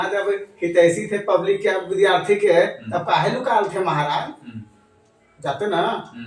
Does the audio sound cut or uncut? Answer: uncut